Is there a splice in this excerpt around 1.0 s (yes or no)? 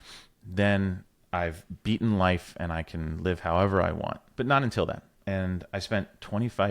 no